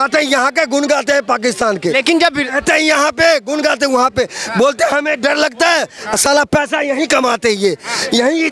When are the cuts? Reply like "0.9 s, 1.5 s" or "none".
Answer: none